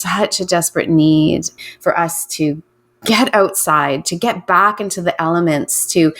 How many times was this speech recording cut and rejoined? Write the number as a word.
one